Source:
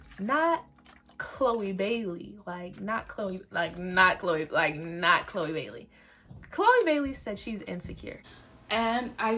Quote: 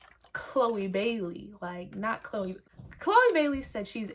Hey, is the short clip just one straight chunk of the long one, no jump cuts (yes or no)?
no